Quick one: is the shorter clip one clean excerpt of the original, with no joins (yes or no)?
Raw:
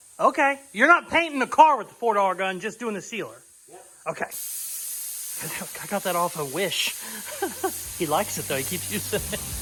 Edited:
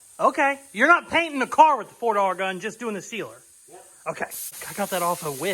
no